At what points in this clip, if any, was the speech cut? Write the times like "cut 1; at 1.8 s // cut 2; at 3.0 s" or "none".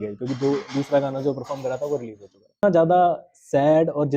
cut 1; at 2.6 s